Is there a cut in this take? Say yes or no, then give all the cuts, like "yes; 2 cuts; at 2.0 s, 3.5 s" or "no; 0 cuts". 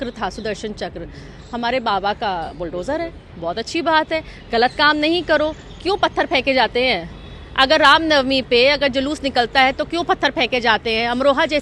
no; 0 cuts